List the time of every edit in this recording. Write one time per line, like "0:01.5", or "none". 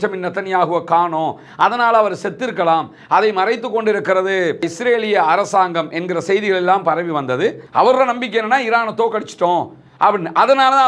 0:07.6